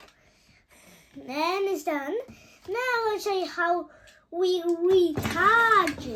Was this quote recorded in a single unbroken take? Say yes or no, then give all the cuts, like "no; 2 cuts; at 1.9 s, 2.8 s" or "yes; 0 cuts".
yes; 0 cuts